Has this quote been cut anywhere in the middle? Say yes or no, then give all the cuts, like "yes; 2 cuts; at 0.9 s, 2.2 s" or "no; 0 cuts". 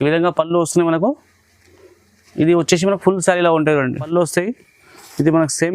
yes; 1 cut; at 4.1 s